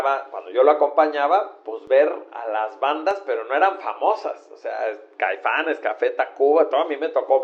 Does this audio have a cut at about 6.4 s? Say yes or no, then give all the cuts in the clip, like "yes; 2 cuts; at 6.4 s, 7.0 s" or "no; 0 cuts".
no; 0 cuts